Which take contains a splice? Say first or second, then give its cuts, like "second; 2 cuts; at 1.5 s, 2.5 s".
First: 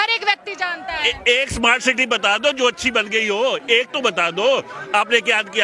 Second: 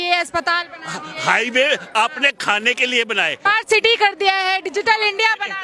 second; 1 cut; at 3.3 s